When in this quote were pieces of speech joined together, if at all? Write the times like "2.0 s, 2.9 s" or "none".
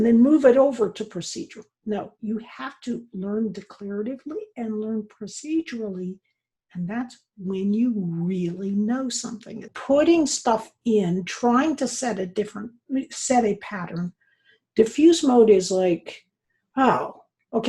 9.7 s

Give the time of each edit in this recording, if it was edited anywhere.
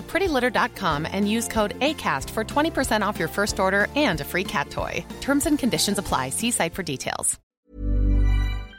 7.4 s

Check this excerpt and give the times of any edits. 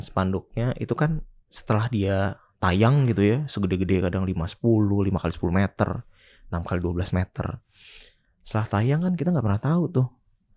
none

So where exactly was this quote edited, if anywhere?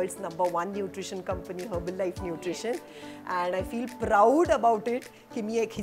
none

